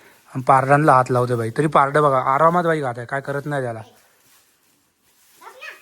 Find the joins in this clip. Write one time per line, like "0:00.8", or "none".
none